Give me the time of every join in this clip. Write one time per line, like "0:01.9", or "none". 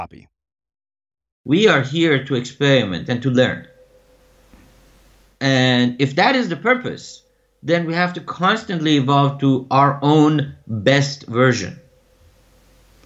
0:01.3